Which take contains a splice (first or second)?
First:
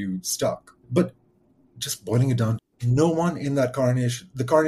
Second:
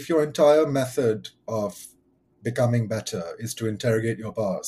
first